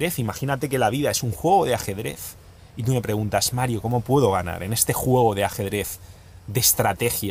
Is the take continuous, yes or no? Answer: yes